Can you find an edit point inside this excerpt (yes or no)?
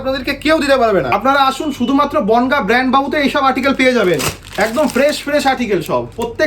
yes